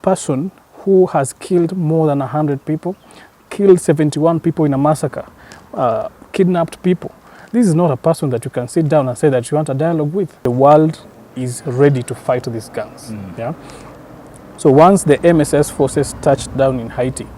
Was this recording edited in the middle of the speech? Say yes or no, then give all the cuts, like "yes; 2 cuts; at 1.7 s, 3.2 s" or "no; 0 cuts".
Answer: yes; 1 cut; at 10.4 s